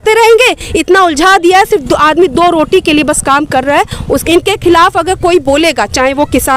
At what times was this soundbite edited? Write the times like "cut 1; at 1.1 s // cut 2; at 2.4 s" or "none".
cut 1; at 4.2 s